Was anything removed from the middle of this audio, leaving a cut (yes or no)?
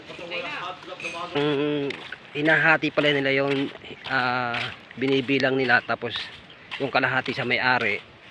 yes